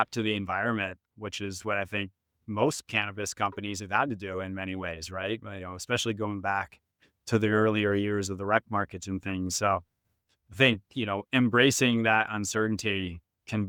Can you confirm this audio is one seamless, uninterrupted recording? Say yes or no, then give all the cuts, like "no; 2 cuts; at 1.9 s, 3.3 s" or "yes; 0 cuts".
yes; 0 cuts